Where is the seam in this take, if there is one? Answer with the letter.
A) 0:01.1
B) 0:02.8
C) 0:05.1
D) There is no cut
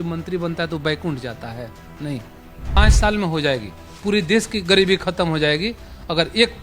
B